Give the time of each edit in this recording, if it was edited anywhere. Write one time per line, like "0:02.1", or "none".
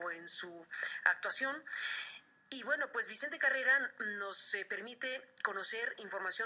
0:03.1